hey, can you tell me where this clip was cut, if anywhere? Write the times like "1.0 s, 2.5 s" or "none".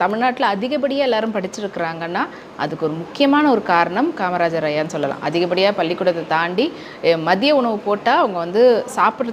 none